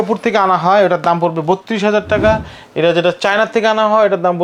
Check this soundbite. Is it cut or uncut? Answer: uncut